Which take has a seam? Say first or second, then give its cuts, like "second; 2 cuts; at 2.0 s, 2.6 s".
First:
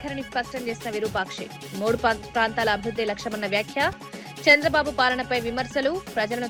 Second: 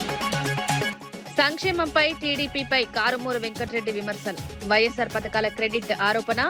second; 1 cut; at 0.9 s